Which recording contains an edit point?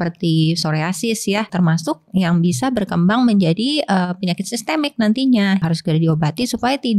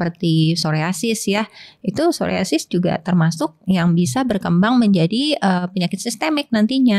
first; 2 cuts; at 1.5 s, 5.6 s

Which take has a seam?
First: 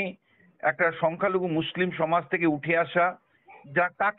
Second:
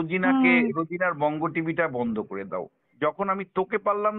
second; 1 cut; at 2.8 s

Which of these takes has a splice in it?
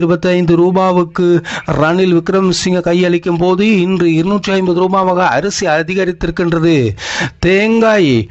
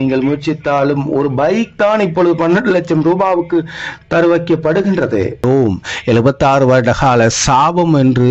second; 1 cut; at 5.4 s

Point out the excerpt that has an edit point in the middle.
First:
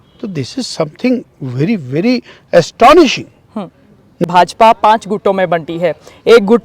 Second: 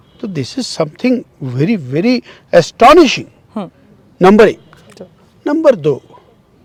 first; 1 cut; at 4.2 s

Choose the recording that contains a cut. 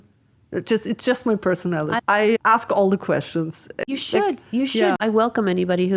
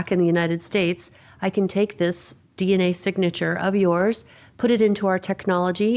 first; 3 cuts; at 2.0 s, 3.8 s, 5.0 s

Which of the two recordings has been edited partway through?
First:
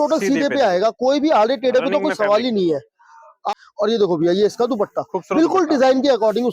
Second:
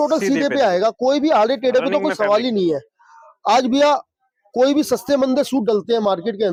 first; 1 cut; at 3.4 s

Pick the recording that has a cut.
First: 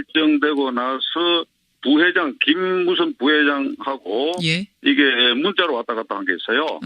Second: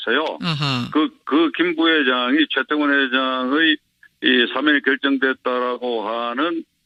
first; 1 cut; at 4.7 s

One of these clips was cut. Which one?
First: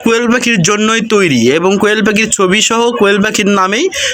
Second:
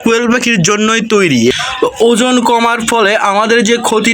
second; 1 cut; at 1.5 s

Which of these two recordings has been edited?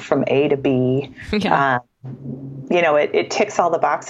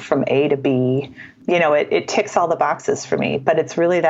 second; 1 cut; at 1.2 s

